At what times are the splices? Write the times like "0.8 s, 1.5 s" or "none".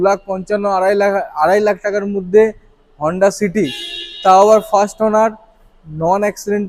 none